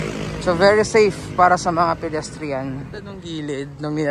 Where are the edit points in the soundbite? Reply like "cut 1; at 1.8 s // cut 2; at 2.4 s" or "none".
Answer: cut 1; at 3.2 s